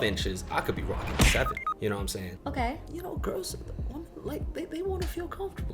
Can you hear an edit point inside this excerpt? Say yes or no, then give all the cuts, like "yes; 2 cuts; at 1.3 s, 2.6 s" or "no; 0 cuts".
yes; 1 cut; at 2.9 s